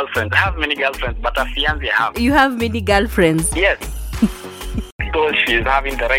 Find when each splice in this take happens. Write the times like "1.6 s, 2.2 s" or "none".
5.0 s